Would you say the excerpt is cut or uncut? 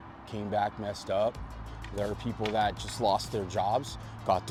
uncut